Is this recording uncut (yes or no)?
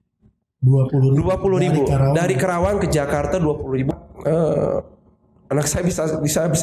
no